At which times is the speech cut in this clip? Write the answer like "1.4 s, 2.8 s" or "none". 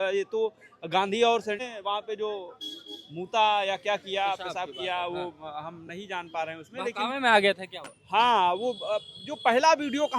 1.6 s